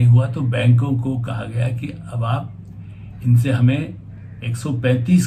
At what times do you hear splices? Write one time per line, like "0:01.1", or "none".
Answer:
none